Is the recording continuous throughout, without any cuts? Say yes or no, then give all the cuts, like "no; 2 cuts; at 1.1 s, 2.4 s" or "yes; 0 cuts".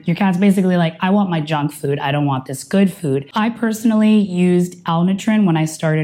no; 1 cut; at 3.3 s